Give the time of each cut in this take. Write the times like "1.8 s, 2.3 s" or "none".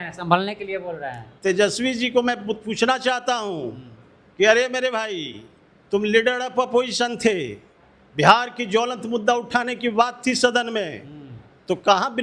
1.2 s